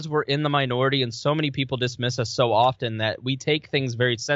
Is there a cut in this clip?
no; 0 cuts

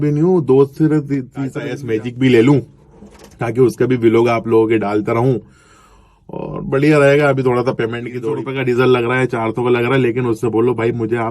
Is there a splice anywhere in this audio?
yes; 2 cuts; at 1.7 s, 8.2 s

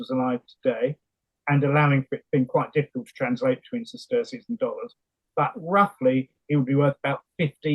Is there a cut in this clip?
no; 0 cuts

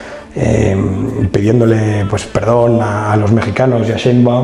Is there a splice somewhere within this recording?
no; 0 cuts

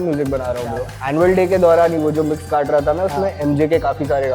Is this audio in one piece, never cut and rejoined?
no; 1 cut; at 0.9 s

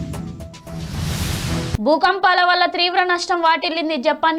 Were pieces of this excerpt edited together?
no; 0 cuts

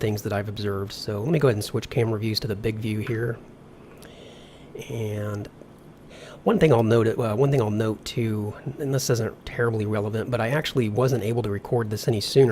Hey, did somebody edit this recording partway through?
yes; 1 cut; at 1.8 s

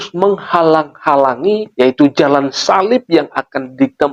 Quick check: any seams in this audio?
yes; 1 cut; at 1.7 s

